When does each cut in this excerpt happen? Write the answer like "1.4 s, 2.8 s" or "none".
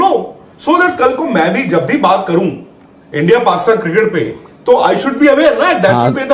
none